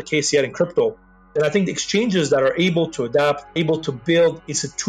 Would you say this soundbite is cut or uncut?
cut